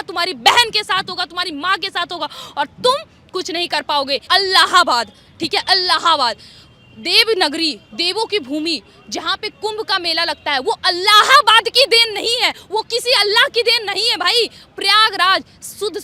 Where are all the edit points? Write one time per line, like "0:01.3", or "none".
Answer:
0:04.2